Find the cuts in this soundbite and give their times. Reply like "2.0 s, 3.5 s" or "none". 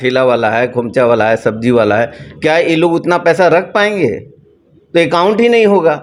none

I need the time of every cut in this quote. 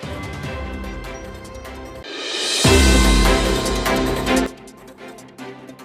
2.0 s, 4.5 s

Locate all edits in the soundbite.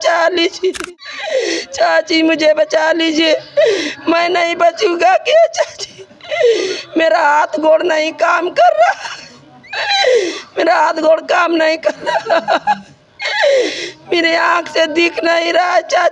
0.9 s

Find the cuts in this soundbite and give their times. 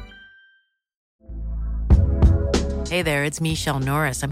1.1 s

